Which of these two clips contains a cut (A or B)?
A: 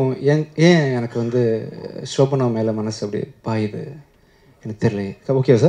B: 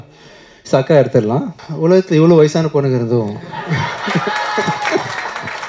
B